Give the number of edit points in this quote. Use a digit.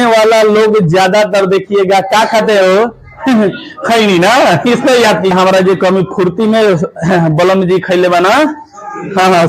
1